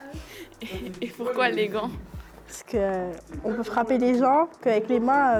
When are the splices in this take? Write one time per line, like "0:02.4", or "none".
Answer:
none